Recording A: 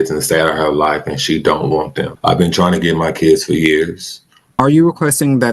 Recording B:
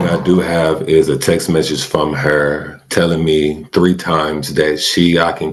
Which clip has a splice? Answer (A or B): A